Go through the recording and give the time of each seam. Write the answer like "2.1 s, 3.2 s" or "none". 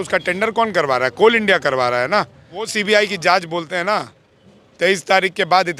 2.7 s

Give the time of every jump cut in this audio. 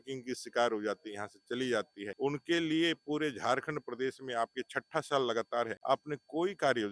2.0 s, 5.8 s

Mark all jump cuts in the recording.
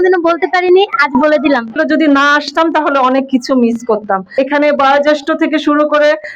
1.8 s

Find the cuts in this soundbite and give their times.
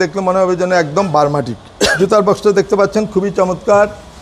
1.9 s

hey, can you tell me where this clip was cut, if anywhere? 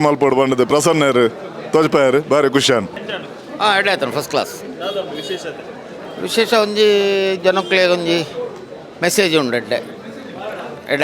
none

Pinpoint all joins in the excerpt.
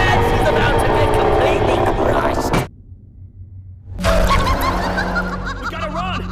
2.6 s

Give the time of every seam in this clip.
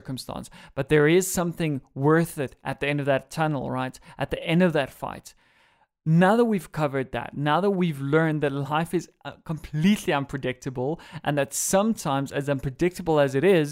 none

